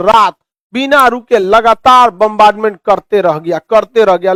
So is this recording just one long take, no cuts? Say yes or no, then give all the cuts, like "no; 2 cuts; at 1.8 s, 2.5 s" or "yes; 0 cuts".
yes; 0 cuts